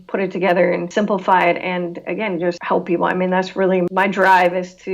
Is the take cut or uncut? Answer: cut